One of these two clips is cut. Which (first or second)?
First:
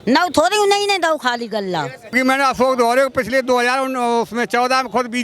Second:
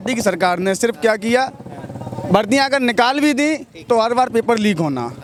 first